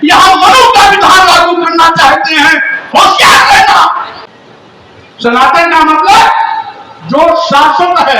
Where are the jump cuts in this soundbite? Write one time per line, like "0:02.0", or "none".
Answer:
0:04.2